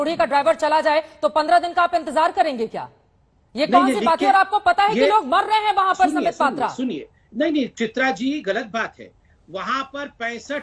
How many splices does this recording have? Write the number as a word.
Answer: zero